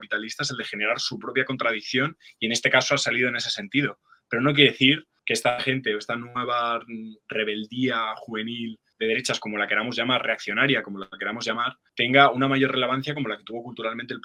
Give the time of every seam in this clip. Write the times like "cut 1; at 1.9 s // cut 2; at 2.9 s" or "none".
none